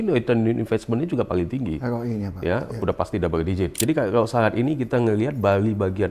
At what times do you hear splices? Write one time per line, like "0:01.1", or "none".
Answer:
0:03.8